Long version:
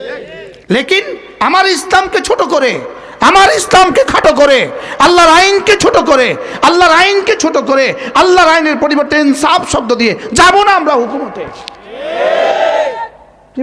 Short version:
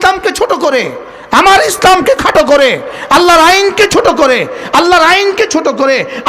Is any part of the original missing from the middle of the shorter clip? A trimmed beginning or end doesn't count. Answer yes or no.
no